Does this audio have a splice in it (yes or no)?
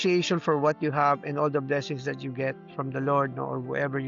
no